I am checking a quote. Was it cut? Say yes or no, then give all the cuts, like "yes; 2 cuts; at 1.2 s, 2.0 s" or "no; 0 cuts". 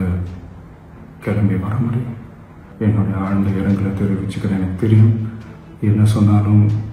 yes; 1 cut; at 2.6 s